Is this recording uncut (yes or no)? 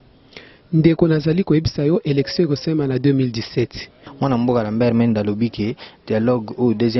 no